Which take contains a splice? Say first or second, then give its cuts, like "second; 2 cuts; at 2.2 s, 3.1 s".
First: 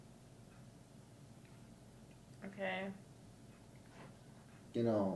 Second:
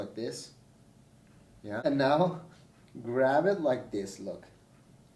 second; 1 cut; at 1.8 s